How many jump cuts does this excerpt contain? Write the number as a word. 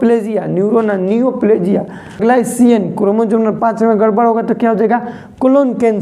one